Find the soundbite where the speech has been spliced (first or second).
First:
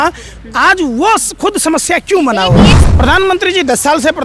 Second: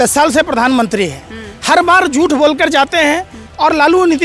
first